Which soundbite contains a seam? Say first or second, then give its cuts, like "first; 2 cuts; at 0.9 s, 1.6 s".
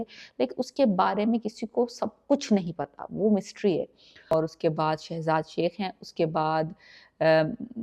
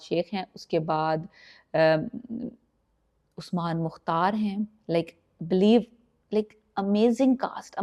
first; 1 cut; at 4.3 s